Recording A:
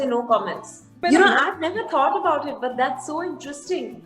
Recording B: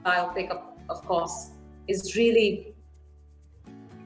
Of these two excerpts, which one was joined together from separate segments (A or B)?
A